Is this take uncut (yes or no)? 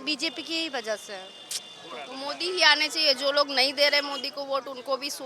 yes